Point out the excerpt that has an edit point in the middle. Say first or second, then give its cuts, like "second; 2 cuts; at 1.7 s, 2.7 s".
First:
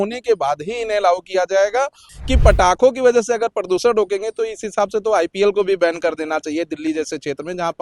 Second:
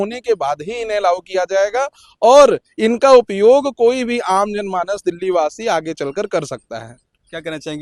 first; 1 cut; at 2.0 s